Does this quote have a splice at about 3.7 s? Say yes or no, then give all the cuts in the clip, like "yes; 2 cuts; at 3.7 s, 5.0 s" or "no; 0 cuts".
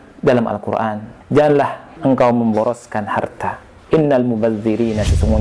yes; 3 cuts; at 1.1 s, 1.8 s, 3.7 s